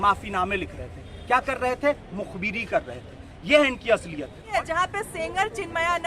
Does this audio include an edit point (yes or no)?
yes